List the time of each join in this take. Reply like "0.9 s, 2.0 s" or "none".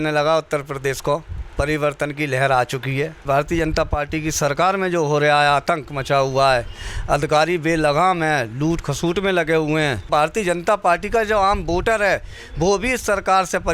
3.2 s, 10.1 s